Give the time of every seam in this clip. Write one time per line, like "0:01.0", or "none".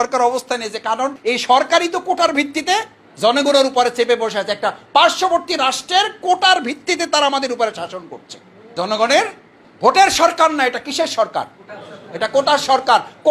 0:01.2